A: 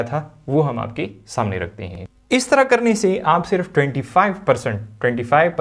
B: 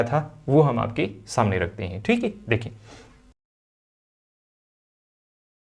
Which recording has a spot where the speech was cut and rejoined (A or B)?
A